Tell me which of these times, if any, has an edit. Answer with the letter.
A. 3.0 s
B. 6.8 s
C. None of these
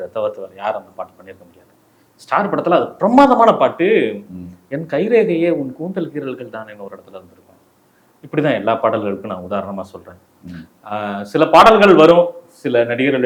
C